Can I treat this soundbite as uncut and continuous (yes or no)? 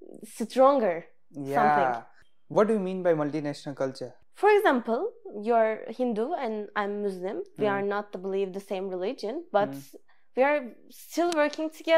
no